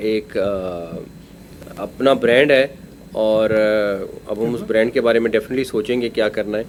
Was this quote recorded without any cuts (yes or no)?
yes